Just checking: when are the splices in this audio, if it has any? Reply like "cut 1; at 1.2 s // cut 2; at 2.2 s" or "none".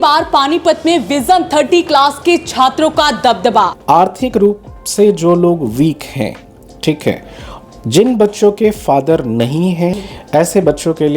cut 1; at 3.8 s // cut 2; at 10.0 s

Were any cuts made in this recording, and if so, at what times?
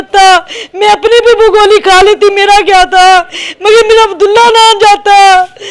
none

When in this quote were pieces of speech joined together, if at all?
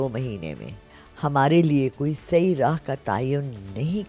none

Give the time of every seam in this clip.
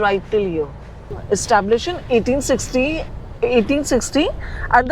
cut 1; at 1.1 s

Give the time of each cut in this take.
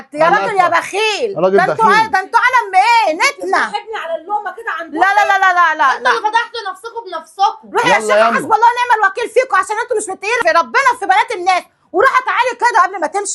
cut 1; at 10.4 s

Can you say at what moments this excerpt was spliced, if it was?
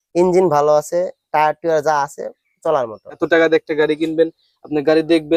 cut 1; at 3.2 s

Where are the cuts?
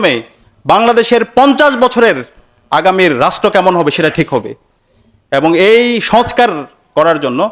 none

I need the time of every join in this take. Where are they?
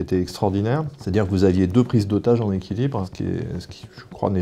cut 1; at 1.0 s

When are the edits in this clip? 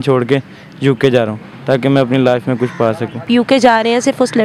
none

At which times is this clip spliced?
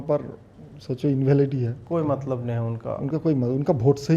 cut 1; at 1.8 s

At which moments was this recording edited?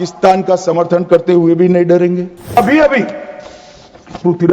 cut 1; at 2.6 s

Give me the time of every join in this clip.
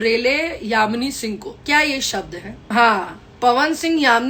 cut 1; at 1.5 s // cut 2; at 2.6 s

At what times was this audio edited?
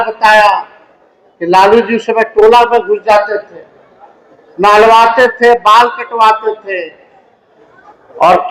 none

